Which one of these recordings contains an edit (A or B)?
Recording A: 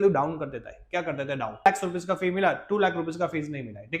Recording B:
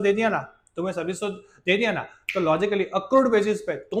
A